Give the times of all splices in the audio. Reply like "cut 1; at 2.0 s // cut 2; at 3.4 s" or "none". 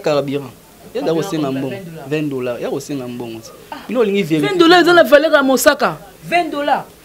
none